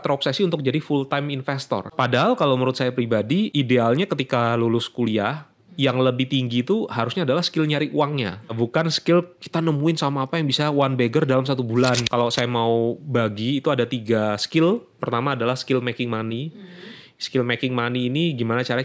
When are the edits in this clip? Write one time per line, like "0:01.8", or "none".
0:01.9
0:03.5
0:08.5
0:12.0